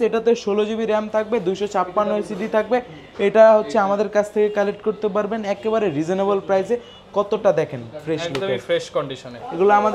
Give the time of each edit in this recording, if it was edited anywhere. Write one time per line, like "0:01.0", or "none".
none